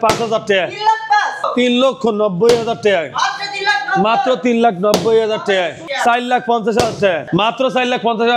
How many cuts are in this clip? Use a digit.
3